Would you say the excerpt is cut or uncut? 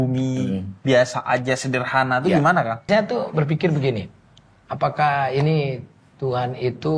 cut